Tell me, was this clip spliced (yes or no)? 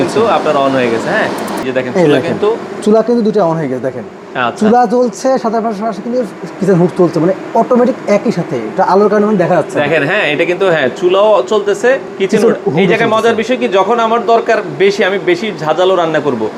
no